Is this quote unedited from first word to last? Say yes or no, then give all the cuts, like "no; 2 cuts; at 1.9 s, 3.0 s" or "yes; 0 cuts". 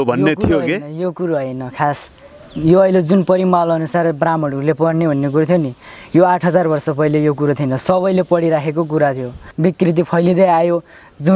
no; 1 cut; at 9.4 s